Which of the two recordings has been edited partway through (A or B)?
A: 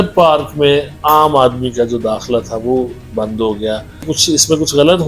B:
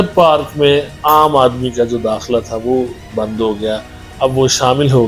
A